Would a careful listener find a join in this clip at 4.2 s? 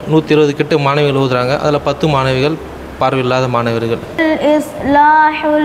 yes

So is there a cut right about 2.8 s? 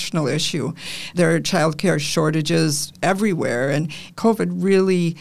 no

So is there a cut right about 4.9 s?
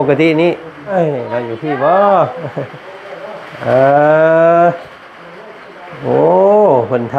no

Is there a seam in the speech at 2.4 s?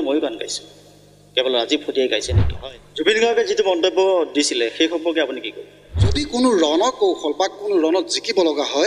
yes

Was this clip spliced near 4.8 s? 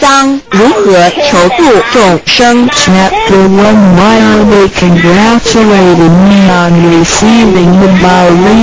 yes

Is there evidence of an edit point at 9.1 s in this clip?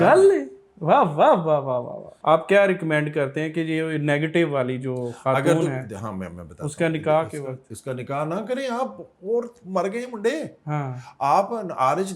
no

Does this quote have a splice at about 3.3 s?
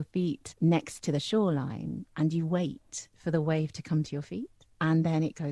no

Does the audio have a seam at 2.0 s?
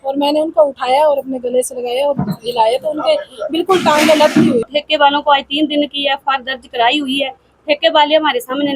no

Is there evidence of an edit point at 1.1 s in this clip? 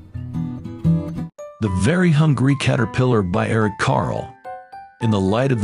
yes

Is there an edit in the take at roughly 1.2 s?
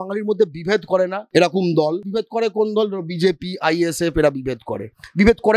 yes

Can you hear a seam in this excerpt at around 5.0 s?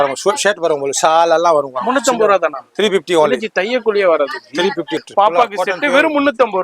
yes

